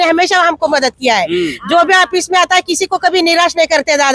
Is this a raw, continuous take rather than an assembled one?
yes; 0 cuts

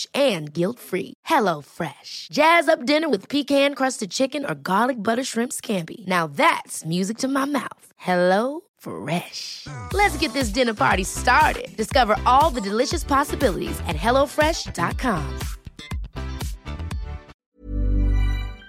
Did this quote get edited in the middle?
yes; 1 cut; at 17.3 s

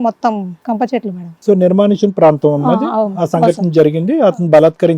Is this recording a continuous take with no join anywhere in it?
no; 1 cut; at 1.4 s

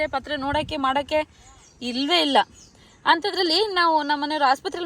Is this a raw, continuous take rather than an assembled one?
yes; 0 cuts

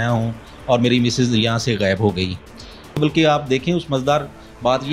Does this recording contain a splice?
yes; 1 cut; at 3.0 s

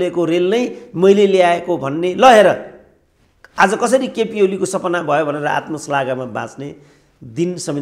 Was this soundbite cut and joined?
no; 0 cuts

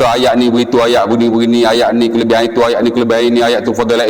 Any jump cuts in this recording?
no; 0 cuts

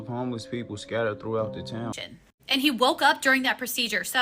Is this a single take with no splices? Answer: no; 1 cut; at 2.0 s

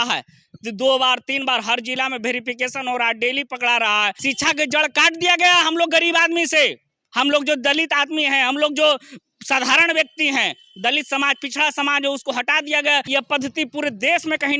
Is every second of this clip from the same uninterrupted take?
no; 2 cuts; at 4.2 s, 13.1 s

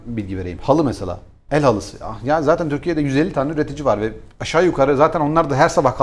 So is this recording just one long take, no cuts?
yes; 0 cuts

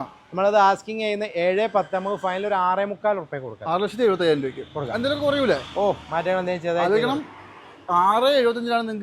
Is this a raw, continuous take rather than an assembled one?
yes; 0 cuts

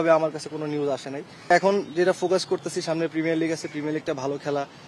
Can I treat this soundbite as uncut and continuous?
no; 1 cut; at 1.5 s

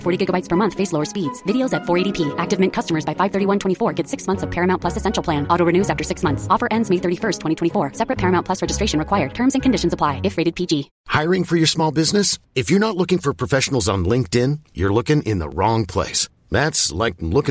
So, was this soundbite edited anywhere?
yes; 1 cut; at 11.0 s

